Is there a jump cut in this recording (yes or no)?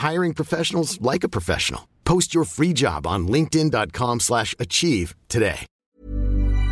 yes